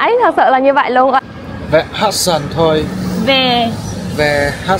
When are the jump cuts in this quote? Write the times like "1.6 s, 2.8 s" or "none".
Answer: 1.2 s